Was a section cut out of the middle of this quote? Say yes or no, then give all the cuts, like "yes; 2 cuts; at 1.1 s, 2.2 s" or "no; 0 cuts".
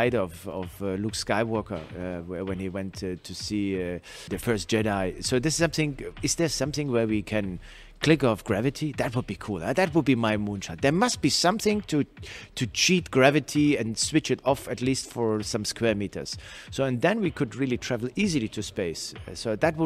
yes; 1 cut; at 4.3 s